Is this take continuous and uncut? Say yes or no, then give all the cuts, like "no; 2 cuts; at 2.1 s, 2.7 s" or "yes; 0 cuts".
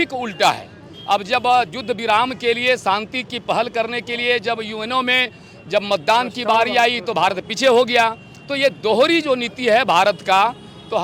yes; 0 cuts